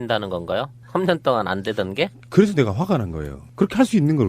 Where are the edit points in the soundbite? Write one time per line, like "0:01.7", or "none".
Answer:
none